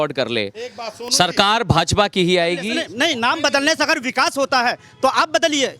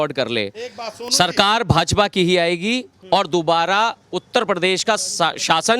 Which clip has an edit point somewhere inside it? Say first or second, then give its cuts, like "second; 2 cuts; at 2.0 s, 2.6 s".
first; 1 cut; at 2.8 s